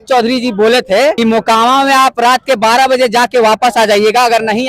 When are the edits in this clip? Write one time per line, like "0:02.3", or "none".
0:01.2